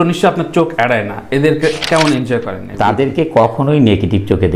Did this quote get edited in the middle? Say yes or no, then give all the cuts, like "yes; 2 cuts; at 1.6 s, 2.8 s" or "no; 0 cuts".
yes; 1 cut; at 2.6 s